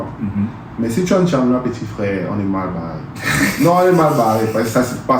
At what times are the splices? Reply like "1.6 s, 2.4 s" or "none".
none